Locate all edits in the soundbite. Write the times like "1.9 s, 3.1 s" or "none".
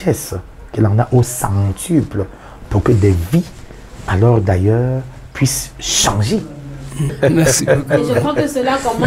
7.1 s